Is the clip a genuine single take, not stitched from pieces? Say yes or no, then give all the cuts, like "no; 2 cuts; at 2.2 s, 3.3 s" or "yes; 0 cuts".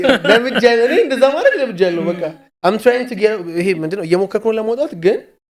yes; 0 cuts